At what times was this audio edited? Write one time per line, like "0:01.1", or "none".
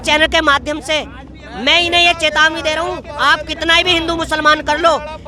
none